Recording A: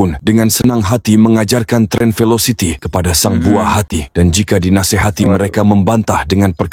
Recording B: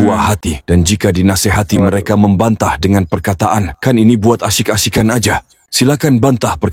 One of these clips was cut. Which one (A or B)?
B